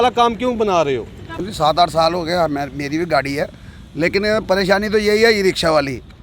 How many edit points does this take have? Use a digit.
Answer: 1